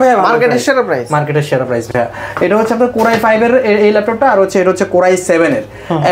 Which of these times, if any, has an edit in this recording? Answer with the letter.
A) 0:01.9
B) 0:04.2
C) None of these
C